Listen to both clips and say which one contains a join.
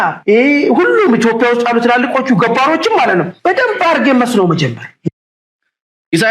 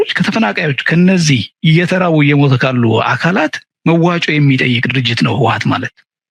first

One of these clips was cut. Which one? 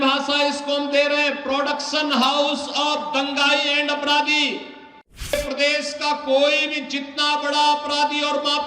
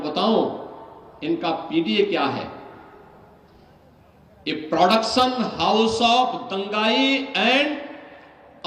first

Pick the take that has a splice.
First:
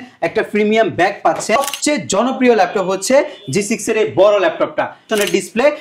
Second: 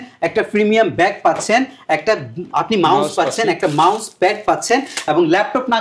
first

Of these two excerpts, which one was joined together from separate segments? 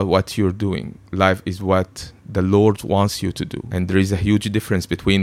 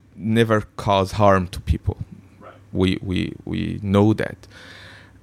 first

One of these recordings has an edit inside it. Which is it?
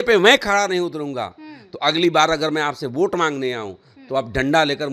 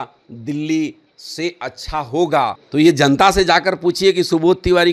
second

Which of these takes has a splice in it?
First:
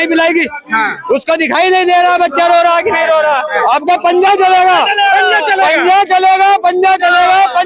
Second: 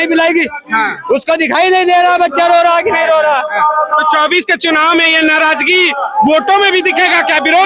first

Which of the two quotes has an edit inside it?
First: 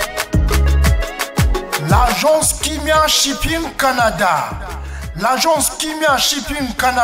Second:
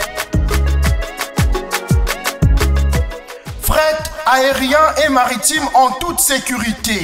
first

